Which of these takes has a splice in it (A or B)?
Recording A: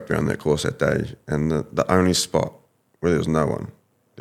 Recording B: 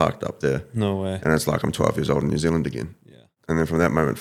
B